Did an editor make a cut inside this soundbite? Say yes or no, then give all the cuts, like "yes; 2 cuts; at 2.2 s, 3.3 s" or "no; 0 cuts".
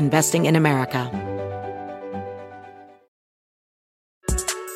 yes; 1 cut; at 1.1 s